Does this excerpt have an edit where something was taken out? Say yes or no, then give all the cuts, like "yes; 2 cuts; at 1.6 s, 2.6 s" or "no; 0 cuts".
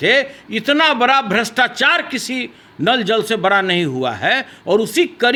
no; 0 cuts